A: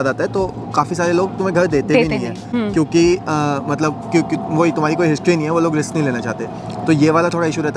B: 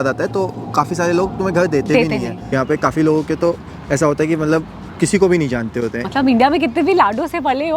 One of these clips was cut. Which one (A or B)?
B